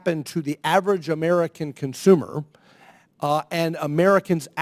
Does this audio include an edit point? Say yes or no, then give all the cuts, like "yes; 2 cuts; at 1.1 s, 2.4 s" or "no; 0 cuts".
no; 0 cuts